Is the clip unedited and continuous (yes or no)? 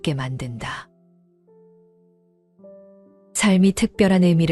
yes